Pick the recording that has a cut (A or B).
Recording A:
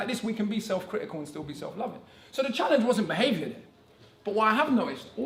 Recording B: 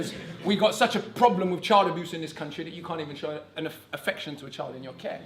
B